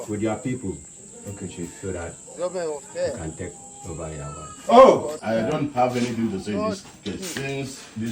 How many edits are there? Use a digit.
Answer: 1